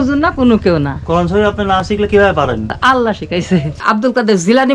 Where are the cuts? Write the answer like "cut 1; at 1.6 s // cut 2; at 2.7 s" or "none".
cut 1; at 2.7 s // cut 2; at 3.8 s